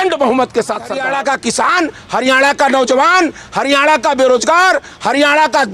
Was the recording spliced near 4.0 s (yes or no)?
no